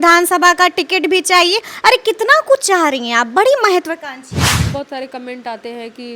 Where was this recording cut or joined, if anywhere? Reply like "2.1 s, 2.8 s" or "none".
4.6 s

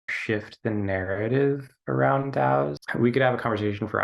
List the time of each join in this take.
2.8 s

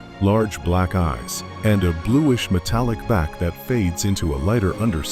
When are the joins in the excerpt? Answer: none

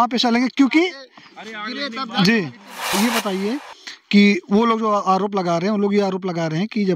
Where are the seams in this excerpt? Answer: 2.8 s

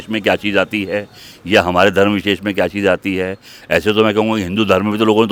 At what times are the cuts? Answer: none

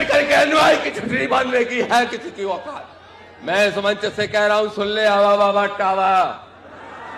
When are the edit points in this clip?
4.0 s

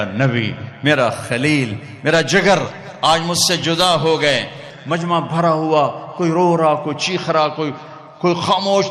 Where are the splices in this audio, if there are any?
4.7 s

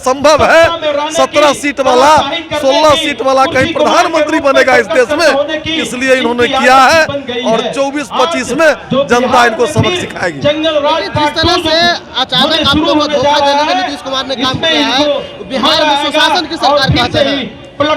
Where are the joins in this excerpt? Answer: none

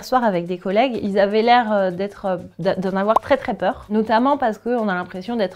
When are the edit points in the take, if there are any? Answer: 1.0 s, 3.8 s

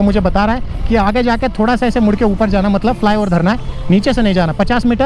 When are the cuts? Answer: none

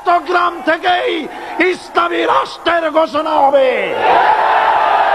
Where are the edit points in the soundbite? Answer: none

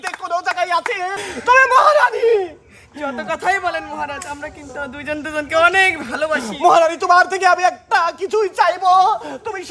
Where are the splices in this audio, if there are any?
1.1 s

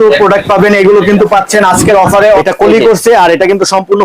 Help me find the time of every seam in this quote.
2.4 s

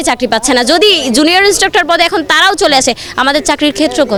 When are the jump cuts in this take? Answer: none

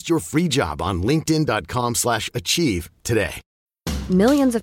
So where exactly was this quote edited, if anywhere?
none

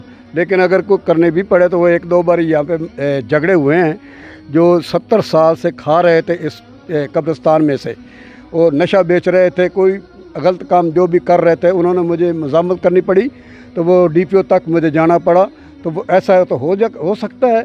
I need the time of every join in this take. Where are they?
none

